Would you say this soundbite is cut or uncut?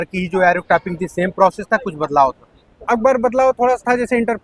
uncut